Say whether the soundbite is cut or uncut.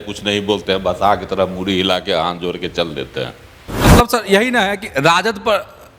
cut